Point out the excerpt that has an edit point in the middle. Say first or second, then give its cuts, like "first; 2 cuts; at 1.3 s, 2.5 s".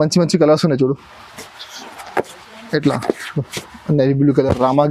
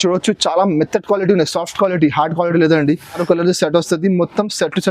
second; 1 cut; at 3.2 s